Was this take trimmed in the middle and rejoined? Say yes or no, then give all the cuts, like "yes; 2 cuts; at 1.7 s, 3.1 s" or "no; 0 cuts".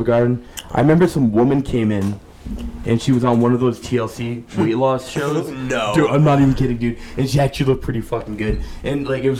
no; 0 cuts